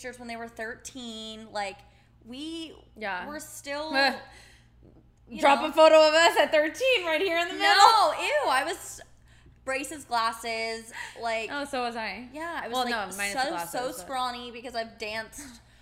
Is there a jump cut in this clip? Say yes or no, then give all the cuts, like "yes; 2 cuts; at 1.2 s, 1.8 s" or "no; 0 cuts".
no; 0 cuts